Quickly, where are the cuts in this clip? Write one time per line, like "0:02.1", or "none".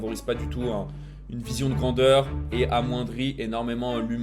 0:02.4